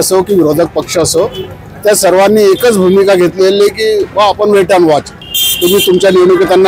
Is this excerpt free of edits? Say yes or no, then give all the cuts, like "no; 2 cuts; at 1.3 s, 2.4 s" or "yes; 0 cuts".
no; 1 cut; at 5.2 s